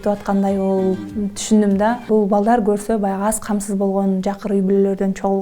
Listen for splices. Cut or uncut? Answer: cut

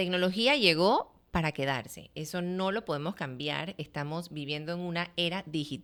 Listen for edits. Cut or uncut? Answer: uncut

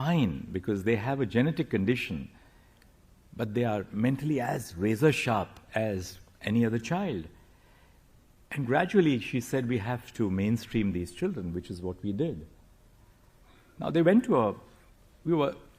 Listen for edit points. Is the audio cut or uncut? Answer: uncut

